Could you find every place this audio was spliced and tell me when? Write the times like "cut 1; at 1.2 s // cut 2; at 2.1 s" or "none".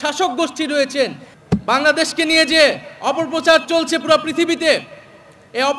cut 1; at 1.3 s